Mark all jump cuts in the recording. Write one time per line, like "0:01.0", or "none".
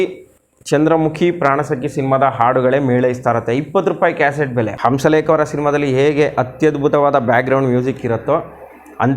0:04.7